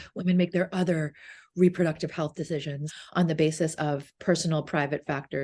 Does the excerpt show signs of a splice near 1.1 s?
no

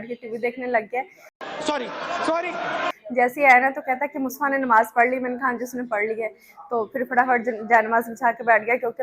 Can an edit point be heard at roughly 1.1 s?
no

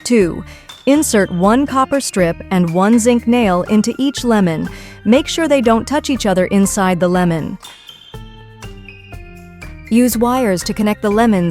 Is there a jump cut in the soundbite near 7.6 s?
yes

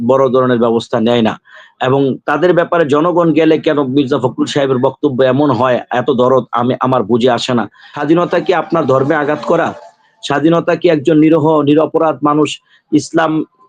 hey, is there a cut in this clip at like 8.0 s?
yes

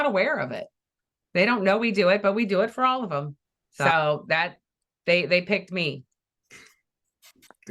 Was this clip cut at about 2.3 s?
no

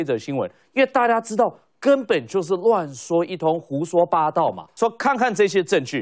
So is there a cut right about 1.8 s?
no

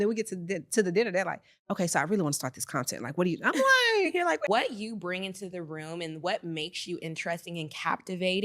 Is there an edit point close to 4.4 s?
yes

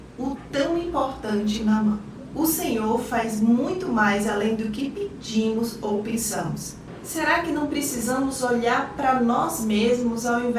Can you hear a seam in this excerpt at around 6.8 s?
yes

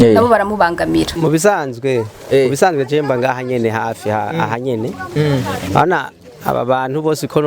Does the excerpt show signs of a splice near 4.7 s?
no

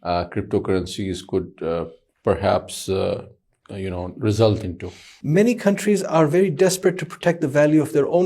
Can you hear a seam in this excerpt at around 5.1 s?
yes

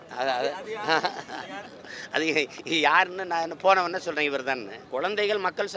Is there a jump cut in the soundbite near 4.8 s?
yes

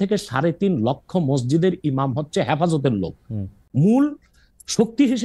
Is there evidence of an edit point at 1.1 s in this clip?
no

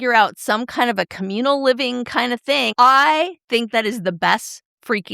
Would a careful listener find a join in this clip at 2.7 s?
yes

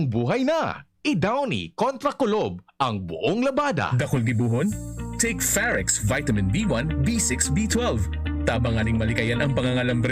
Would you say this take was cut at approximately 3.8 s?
yes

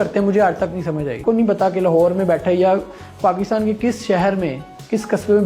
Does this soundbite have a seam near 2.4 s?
no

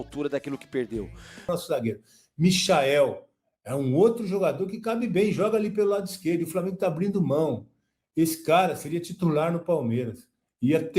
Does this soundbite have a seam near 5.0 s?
no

